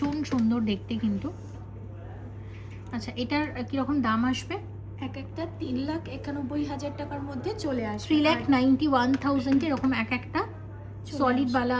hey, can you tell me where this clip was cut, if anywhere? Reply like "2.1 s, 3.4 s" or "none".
none